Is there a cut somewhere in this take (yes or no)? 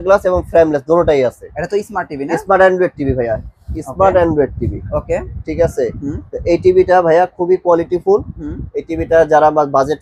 no